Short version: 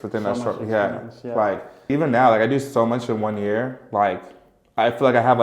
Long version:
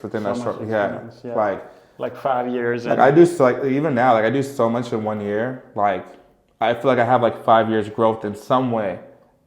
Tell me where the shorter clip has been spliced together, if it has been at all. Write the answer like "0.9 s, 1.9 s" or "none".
1.9 s